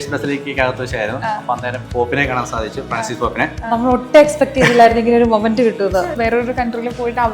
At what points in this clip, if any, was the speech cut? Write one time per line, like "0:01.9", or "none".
0:06.1